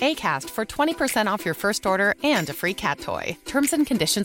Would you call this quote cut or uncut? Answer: uncut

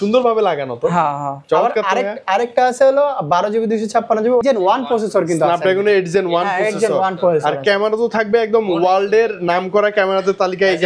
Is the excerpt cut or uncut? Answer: cut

